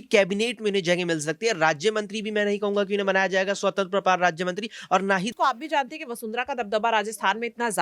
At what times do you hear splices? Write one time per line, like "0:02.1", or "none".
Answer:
0:05.3

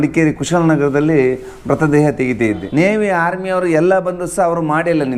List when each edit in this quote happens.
0:02.6

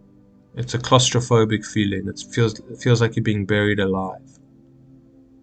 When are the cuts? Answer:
none

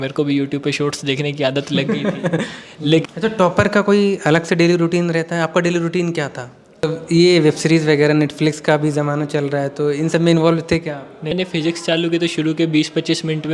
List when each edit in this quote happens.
0:03.0
0:06.8
0:11.3

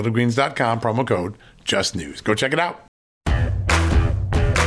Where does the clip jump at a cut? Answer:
0:03.1

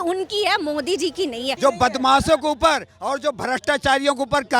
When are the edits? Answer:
0:01.5

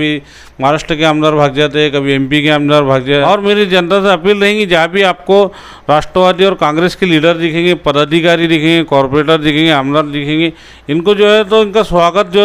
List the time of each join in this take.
0:03.2

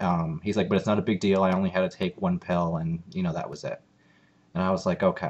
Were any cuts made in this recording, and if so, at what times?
0:04.0

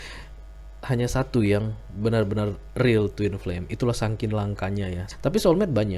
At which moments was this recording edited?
0:05.0

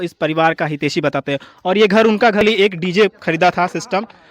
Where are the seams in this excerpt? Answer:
0:02.4

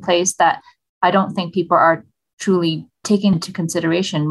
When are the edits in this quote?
0:03.3

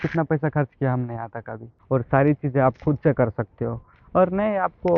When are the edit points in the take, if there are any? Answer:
0:01.7

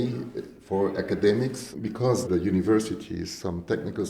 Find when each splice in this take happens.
0:01.8

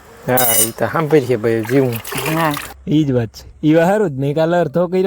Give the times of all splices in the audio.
0:02.7

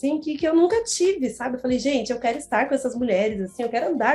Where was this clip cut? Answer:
none

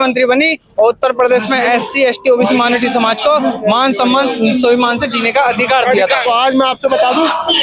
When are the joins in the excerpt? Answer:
0:06.2

